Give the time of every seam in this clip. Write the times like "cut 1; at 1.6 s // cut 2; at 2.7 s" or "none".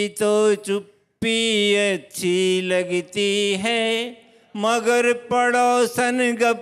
none